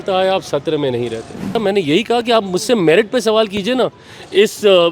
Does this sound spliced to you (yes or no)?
yes